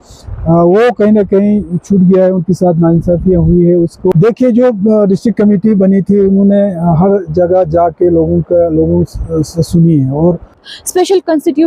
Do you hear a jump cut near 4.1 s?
yes; 2 cuts; at 4.1 s, 10.7 s

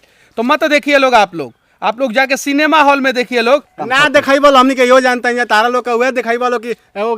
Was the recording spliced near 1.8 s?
no; 1 cut; at 3.7 s

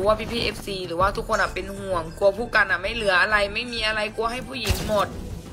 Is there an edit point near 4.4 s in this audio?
no; 0 cuts

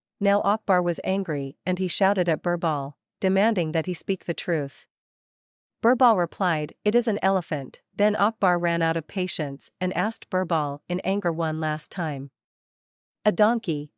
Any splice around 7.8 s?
yes; 1 cut; at 7.8 s

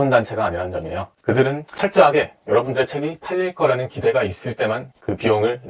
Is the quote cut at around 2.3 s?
no; 1 cut; at 1.1 s

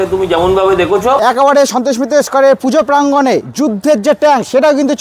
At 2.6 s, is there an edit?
no; 1 cut; at 1.2 s

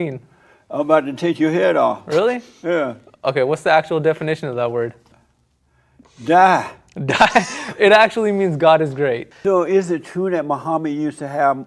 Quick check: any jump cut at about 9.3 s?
yes; 1 cut; at 9.3 s

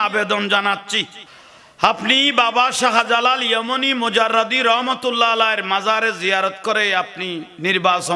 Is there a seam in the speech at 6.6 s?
no; 1 cut; at 1.1 s

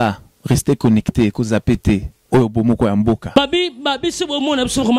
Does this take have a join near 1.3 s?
no; 1 cut; at 3.3 s

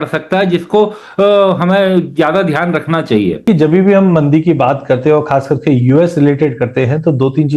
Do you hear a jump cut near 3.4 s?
yes; 1 cut; at 3.4 s

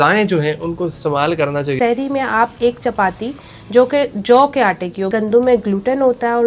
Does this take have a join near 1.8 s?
yes; 2 cuts; at 1.8 s, 5.1 s

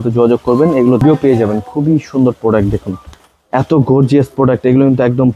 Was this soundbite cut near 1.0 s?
yes; 1 cut; at 1.0 s

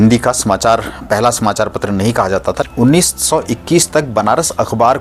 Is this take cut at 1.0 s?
no; 1 cut; at 2.6 s

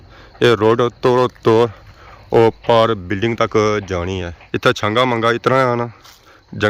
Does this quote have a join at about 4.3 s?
yes; 1 cut; at 4.3 s

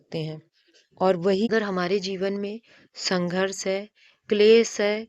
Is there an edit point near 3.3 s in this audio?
no; 1 cut; at 1.5 s

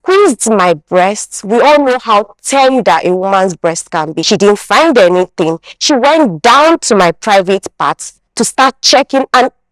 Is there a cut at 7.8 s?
no; 1 cut; at 4.2 s

